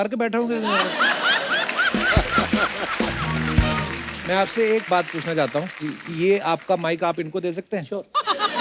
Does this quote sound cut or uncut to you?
uncut